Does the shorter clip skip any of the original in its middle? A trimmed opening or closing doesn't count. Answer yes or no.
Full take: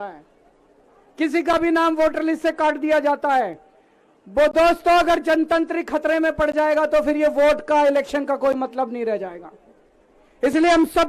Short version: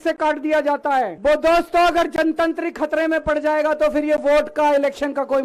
yes